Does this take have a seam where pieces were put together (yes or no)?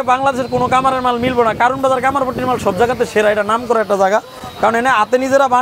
no